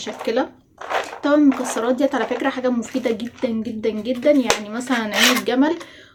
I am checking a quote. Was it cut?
no; 0 cuts

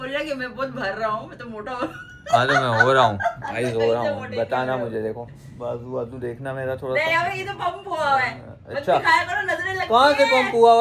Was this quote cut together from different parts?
no; 0 cuts

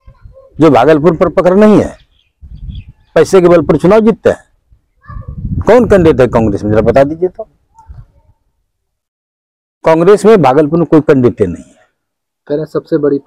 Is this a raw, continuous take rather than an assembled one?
yes; 0 cuts

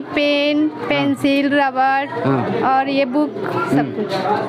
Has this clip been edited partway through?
no; 0 cuts

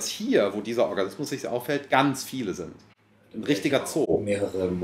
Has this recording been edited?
no; 0 cuts

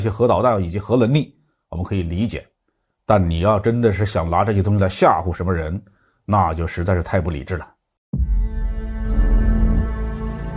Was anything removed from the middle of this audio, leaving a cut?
yes; 1 cut; at 7.9 s

